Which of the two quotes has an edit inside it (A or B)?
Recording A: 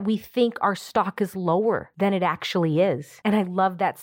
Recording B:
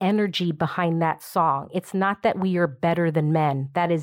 A